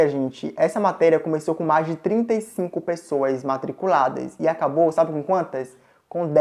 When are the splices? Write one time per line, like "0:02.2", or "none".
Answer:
none